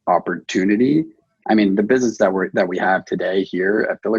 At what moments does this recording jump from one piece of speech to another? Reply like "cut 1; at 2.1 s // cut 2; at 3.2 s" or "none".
cut 1; at 1.3 s